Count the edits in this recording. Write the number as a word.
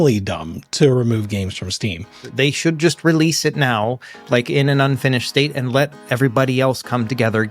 one